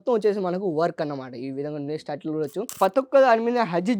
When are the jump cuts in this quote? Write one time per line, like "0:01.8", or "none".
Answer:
0:02.8

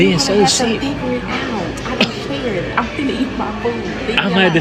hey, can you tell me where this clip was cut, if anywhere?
none

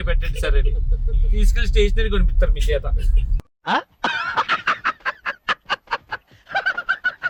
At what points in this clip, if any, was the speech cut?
none

